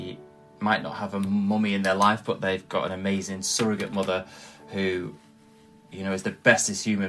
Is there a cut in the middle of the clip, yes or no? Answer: no